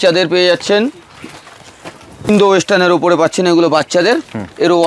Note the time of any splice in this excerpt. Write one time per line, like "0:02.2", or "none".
0:02.3